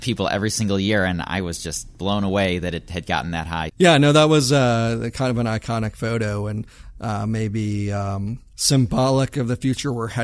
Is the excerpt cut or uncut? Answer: cut